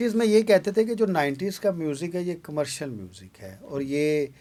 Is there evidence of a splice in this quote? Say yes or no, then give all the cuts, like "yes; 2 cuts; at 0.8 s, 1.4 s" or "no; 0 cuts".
no; 0 cuts